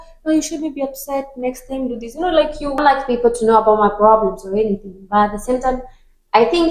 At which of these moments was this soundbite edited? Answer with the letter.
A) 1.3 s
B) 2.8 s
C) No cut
B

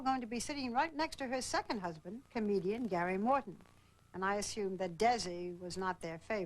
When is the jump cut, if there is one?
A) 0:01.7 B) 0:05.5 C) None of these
A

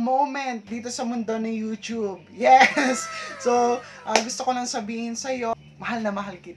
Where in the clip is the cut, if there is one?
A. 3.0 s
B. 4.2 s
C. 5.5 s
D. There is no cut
C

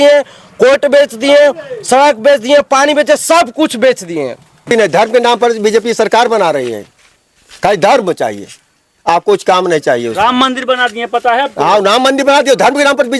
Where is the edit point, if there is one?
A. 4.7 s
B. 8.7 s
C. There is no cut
A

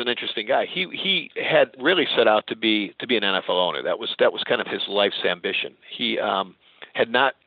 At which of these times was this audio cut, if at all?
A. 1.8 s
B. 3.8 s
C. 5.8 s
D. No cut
A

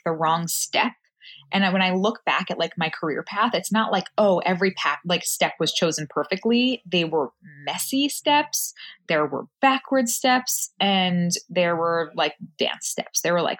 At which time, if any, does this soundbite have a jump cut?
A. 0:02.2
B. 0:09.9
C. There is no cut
C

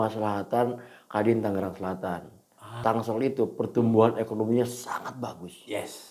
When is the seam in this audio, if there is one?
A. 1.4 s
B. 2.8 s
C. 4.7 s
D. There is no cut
B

